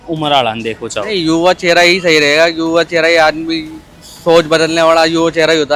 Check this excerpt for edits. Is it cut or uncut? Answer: uncut